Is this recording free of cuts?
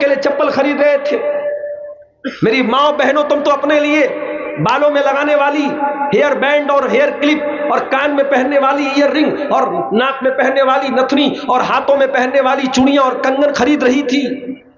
yes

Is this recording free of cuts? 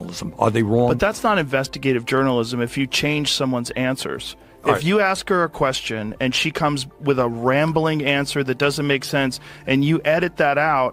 yes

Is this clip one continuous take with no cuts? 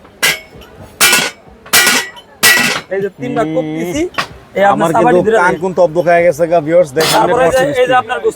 no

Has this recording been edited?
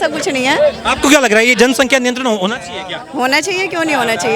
no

